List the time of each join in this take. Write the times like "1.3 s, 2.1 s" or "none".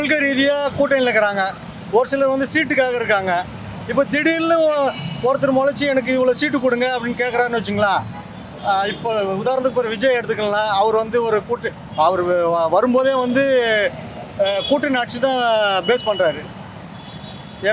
none